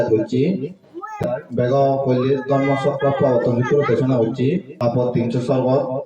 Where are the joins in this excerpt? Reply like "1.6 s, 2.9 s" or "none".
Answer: 1.2 s, 4.7 s